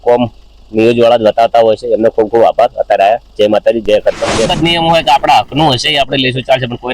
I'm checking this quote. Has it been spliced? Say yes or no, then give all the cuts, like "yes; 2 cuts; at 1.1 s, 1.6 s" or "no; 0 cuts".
yes; 1 cut; at 4.5 s